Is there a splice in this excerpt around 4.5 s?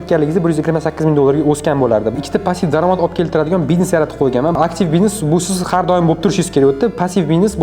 yes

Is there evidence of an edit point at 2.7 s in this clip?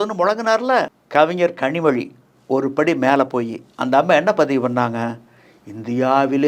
no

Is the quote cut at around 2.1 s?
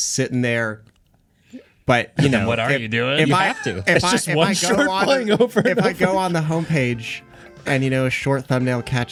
no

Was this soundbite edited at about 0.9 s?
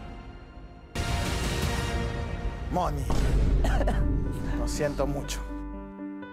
yes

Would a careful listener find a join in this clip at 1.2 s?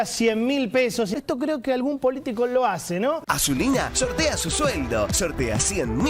yes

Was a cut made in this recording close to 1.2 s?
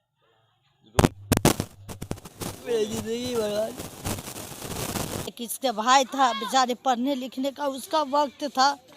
yes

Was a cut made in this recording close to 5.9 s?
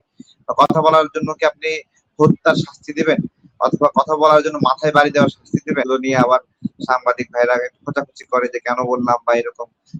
yes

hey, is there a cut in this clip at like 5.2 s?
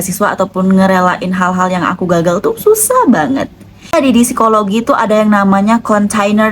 no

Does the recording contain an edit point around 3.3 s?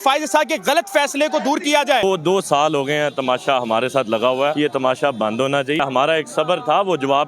no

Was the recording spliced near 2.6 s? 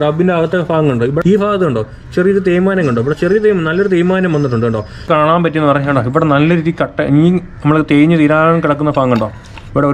no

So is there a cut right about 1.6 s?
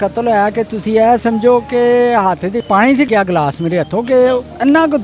no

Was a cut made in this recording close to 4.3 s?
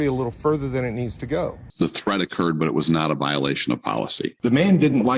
yes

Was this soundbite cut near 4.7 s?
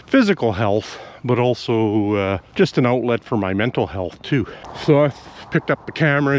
yes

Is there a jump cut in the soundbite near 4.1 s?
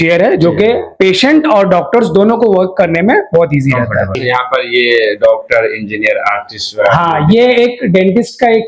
yes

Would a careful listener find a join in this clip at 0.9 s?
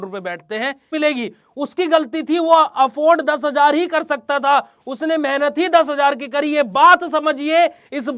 yes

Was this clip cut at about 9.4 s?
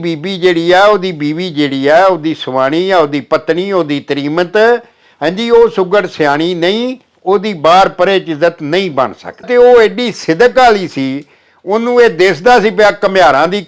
yes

